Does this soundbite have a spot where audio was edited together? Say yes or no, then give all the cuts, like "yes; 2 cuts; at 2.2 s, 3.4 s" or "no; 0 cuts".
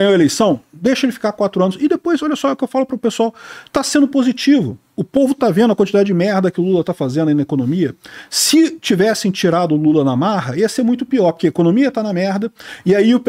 no; 0 cuts